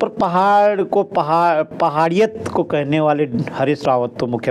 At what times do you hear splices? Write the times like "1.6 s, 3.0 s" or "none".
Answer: none